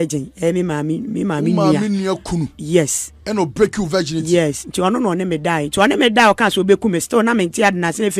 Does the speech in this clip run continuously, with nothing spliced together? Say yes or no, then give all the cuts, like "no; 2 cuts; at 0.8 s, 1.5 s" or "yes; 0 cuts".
yes; 0 cuts